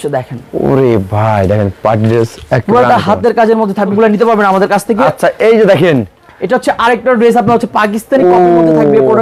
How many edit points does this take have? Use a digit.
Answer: 1